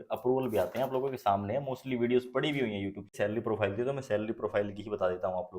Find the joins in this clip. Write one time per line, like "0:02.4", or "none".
0:03.1